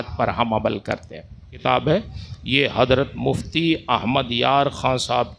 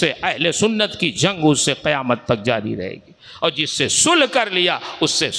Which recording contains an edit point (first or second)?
first